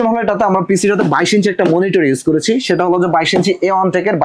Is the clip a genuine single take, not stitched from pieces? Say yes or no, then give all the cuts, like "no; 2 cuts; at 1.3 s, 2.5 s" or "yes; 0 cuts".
yes; 0 cuts